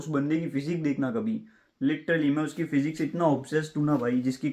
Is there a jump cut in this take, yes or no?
no